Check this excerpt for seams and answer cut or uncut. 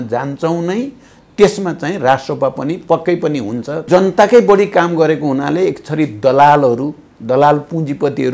cut